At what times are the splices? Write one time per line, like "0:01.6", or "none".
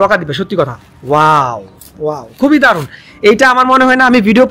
none